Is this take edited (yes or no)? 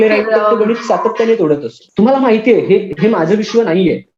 yes